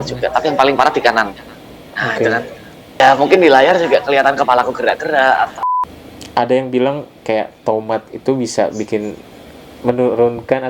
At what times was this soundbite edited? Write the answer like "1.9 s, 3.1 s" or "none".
3.0 s, 5.6 s